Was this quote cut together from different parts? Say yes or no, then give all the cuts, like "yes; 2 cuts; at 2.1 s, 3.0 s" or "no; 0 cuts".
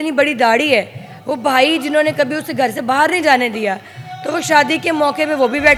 no; 0 cuts